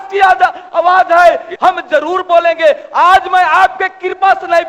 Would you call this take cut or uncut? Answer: cut